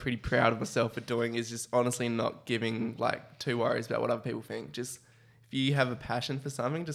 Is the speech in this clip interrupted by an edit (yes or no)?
no